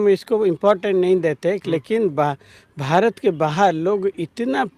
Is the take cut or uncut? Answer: uncut